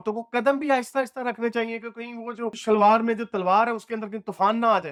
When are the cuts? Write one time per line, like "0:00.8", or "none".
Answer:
none